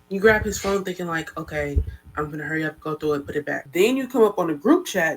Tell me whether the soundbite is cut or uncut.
cut